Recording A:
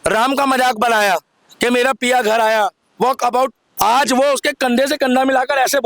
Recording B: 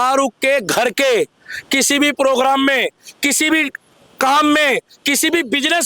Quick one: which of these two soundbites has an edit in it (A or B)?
A